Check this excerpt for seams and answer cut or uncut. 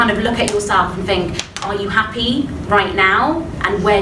uncut